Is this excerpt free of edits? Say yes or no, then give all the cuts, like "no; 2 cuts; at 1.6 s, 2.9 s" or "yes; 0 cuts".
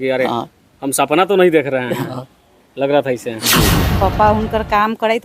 no; 1 cut; at 3.9 s